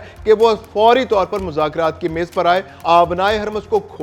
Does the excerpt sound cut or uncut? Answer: cut